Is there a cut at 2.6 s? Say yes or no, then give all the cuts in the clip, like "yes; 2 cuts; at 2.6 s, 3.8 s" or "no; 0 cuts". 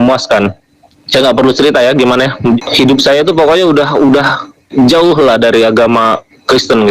yes; 1 cut; at 2.6 s